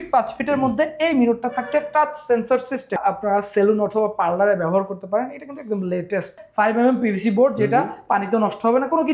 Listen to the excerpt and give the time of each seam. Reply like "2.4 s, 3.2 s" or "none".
3.0 s, 6.4 s